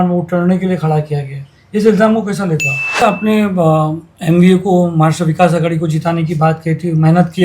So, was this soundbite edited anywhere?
yes; 1 cut; at 3.0 s

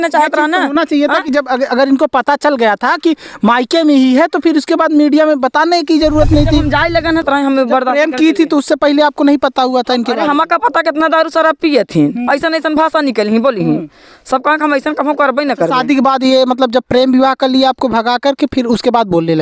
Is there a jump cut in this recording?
yes; 1 cut; at 7.2 s

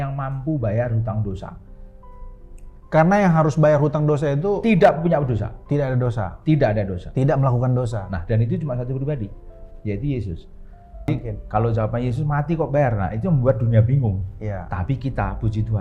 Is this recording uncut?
no; 1 cut; at 11.1 s

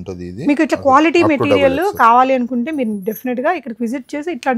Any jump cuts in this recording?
no; 0 cuts

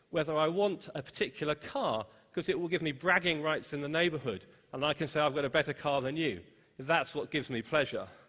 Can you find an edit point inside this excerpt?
yes; 1 cut; at 2.8 s

